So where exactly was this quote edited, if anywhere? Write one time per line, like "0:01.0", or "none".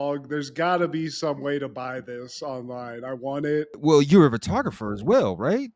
0:03.7